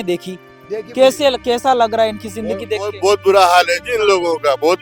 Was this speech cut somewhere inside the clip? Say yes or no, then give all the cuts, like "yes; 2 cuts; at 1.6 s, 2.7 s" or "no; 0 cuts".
no; 0 cuts